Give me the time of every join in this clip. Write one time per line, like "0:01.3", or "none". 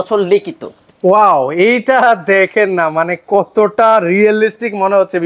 none